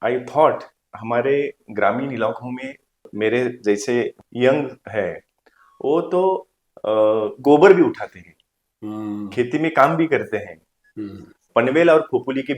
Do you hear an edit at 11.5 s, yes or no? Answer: yes